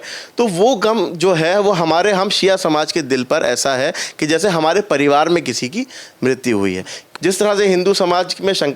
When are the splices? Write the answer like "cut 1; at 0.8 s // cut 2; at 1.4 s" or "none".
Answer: cut 1; at 7.1 s